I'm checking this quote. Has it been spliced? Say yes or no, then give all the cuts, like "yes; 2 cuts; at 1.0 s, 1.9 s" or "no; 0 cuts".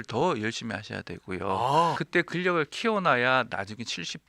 yes; 1 cut; at 2.0 s